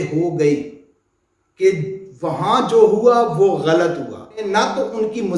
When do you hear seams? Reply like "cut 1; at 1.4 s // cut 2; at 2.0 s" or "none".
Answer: cut 1; at 4.4 s